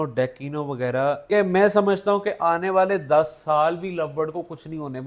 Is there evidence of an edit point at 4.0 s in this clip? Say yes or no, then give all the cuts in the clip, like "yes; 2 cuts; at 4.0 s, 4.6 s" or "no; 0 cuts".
no; 1 cut; at 1.3 s